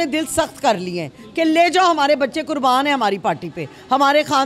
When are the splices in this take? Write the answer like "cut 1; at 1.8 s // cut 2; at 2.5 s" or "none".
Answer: none